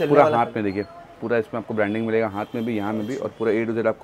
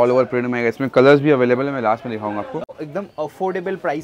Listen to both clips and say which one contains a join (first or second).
second